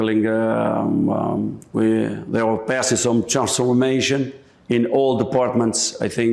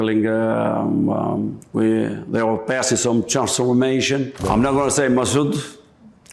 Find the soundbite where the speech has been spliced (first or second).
second